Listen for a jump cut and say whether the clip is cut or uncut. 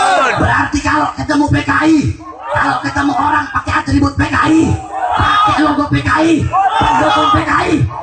uncut